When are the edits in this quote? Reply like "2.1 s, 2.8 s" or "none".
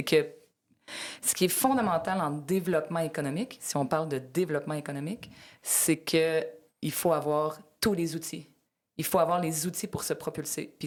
none